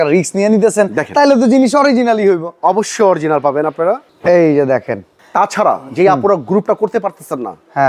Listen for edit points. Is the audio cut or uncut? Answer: uncut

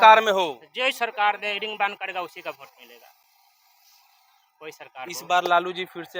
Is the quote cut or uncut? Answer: uncut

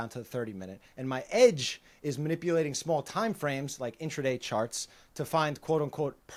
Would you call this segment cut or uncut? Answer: uncut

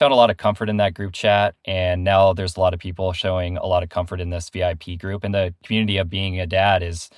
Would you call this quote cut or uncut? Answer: uncut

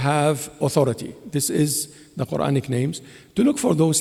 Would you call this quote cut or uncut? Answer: uncut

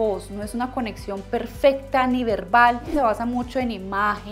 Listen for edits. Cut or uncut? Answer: cut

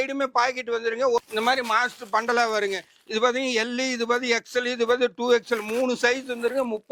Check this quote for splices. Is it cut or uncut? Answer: cut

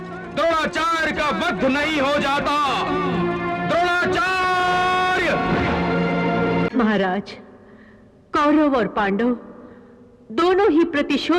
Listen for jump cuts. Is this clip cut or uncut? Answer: cut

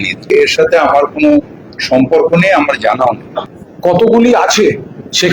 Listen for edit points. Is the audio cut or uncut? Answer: cut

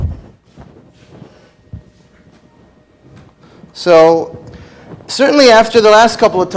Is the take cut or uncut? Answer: cut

